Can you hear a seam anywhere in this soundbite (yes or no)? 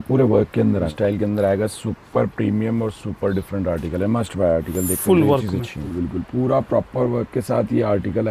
yes